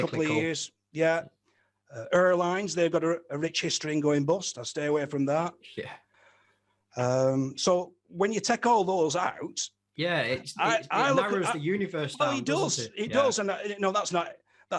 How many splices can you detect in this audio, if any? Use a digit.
1